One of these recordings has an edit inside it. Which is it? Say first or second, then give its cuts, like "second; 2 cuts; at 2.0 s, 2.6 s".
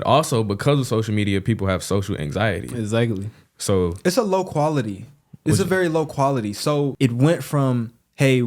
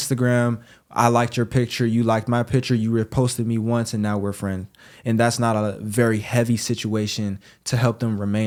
first; 1 cut; at 6.9 s